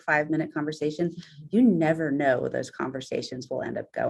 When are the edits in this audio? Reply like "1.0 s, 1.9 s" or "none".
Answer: none